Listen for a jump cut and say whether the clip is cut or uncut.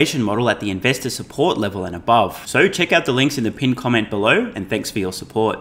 uncut